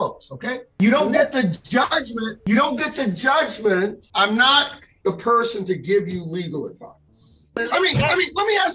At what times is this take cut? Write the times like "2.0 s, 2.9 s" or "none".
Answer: 0.8 s, 4.0 s, 7.6 s

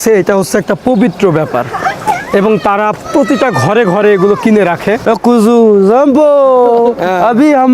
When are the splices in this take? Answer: 5.1 s

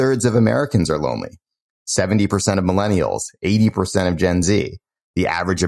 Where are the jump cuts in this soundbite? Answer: none

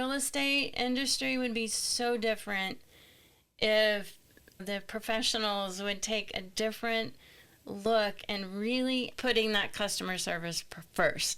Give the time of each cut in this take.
4.6 s, 9.1 s

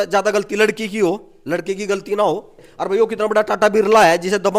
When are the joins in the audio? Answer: 2.7 s

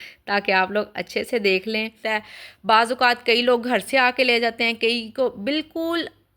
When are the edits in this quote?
2.0 s

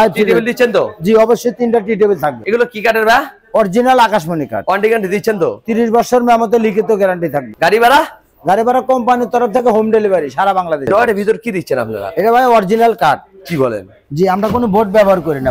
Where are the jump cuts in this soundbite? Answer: 2.4 s, 7.5 s, 10.9 s

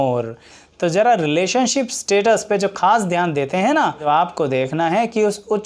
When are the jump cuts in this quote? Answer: 4.0 s

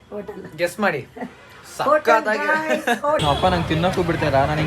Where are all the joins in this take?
3.2 s

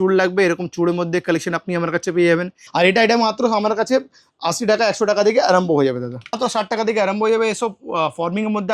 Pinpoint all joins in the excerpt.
2.6 s, 6.4 s

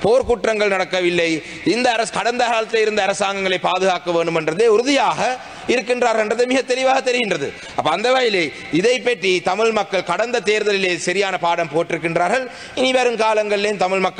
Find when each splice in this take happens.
none

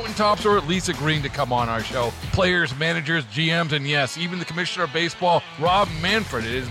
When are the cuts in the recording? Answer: none

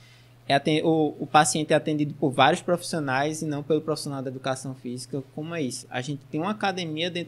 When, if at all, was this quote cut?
none

